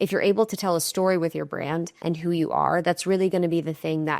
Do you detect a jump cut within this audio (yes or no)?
yes